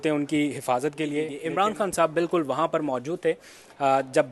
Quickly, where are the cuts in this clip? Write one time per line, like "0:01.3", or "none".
0:01.4